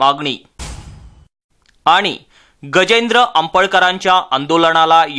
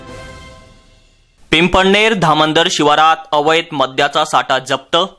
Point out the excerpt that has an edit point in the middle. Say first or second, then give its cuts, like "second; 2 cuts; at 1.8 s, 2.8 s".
second; 1 cut; at 1.0 s